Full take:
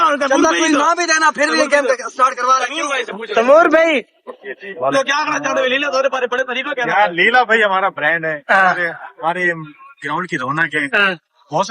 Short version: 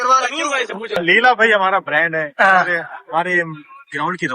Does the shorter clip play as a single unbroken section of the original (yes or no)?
no